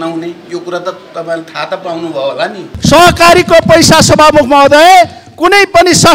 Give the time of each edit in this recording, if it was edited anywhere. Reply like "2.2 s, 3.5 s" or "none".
2.7 s